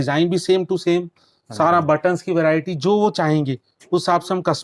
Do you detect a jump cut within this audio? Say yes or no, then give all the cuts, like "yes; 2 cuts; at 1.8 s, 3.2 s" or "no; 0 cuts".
no; 0 cuts